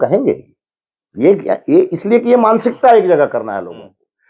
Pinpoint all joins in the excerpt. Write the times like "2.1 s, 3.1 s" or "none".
none